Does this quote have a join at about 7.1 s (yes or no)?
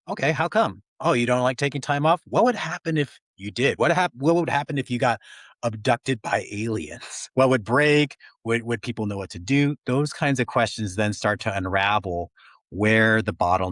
yes